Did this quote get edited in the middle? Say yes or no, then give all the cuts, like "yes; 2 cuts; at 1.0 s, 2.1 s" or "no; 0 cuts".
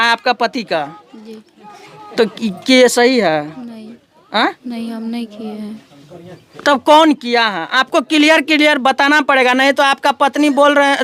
no; 0 cuts